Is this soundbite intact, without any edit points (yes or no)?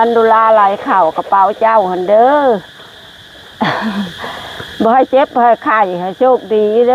yes